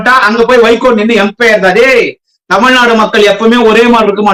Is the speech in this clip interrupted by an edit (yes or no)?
no